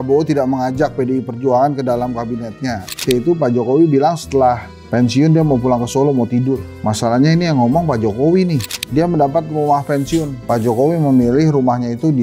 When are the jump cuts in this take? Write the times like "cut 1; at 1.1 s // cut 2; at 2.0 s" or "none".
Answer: cut 1; at 3.0 s // cut 2; at 8.7 s